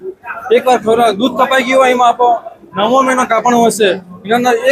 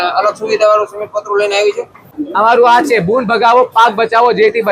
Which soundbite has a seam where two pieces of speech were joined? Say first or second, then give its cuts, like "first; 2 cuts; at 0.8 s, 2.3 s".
second; 1 cut; at 2.2 s